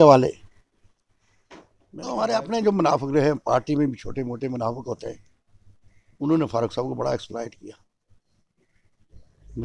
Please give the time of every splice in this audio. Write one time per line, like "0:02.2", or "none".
0:02.0